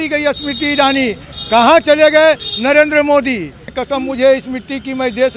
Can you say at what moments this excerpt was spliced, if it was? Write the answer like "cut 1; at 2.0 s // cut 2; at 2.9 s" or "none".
cut 1; at 3.8 s